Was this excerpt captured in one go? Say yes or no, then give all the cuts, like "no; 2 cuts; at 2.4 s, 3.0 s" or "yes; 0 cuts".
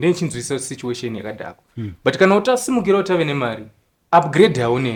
yes; 0 cuts